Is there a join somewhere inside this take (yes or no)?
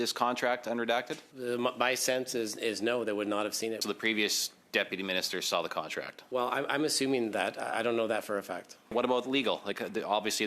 yes